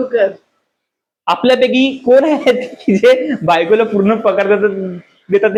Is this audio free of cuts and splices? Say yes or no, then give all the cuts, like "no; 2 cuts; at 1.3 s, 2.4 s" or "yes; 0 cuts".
yes; 0 cuts